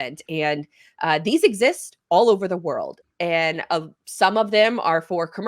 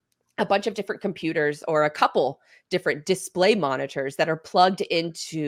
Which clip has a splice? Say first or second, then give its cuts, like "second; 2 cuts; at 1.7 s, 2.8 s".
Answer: first; 1 cut; at 2.9 s